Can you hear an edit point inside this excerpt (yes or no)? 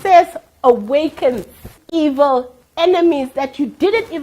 yes